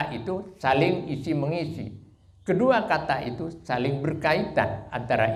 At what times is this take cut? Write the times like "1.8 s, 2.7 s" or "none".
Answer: none

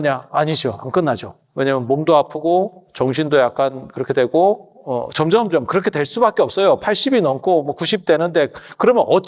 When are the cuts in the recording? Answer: none

